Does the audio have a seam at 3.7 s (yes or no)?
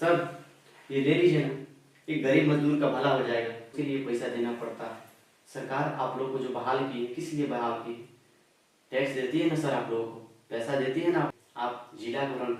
yes